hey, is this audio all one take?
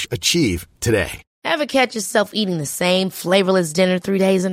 no; 1 cut; at 1.2 s

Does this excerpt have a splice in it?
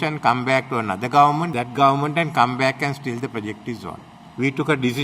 yes; 1 cut; at 1.5 s

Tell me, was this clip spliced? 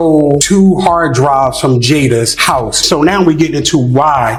no; 0 cuts

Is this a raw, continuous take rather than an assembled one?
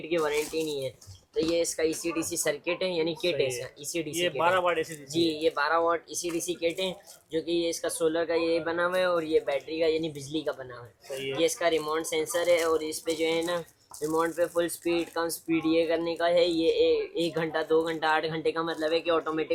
yes; 0 cuts

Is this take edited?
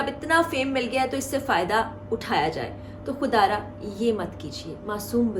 no; 0 cuts

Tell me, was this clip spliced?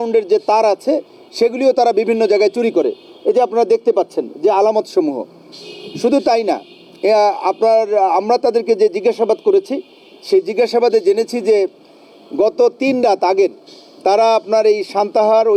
no; 0 cuts

